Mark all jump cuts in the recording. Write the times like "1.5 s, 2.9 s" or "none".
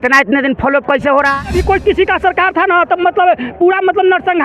1.4 s